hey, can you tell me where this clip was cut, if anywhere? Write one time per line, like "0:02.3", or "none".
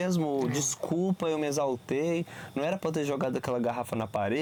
none